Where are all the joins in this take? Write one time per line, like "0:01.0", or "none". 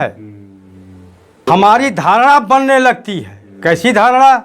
0:01.4